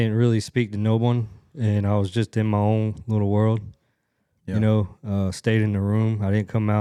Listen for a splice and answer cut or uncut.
uncut